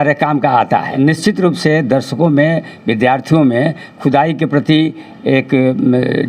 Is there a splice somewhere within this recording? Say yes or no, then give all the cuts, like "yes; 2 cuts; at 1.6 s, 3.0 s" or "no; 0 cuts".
yes; 1 cut; at 1.0 s